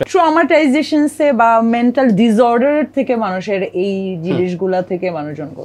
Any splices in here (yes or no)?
no